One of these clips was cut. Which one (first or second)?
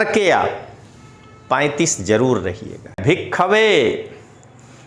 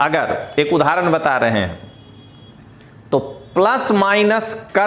first